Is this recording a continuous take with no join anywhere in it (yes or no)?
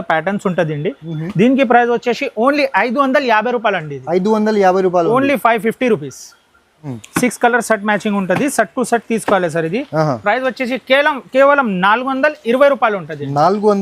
no